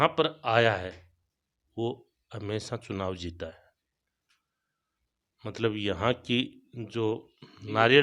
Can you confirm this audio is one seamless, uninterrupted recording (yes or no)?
yes